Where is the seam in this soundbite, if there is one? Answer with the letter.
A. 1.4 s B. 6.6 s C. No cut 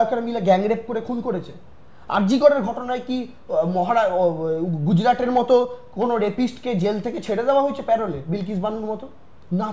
C